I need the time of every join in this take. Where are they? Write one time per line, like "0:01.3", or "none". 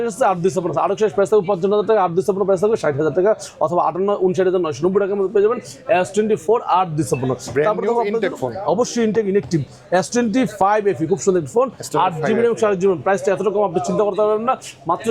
none